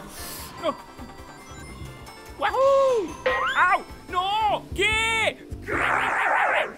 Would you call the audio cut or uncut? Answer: cut